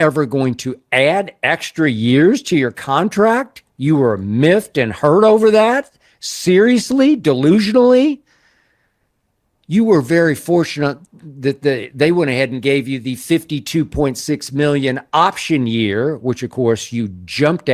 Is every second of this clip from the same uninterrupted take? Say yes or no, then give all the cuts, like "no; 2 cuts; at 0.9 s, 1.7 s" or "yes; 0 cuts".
yes; 0 cuts